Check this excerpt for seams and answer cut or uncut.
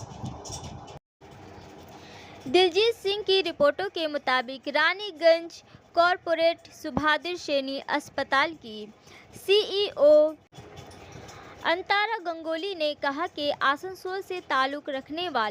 uncut